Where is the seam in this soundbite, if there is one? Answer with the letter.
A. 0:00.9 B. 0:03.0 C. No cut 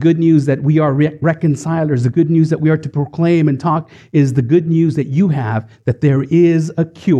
C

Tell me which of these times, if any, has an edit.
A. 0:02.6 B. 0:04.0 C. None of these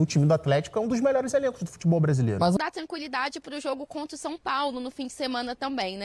A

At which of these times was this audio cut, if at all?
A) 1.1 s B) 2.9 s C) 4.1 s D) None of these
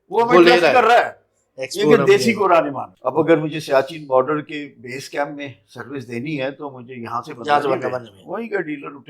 B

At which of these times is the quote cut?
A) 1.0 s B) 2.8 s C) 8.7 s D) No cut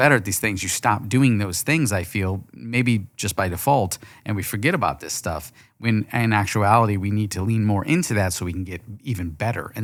D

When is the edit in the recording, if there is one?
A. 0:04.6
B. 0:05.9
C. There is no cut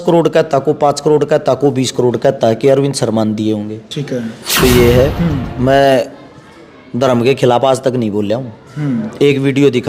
A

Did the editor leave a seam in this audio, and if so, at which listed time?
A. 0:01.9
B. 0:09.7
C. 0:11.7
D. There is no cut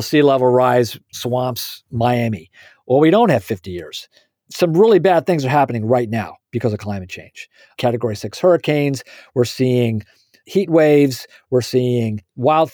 C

